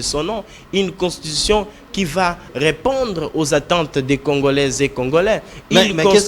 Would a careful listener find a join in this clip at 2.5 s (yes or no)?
yes